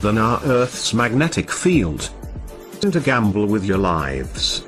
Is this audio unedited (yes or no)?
yes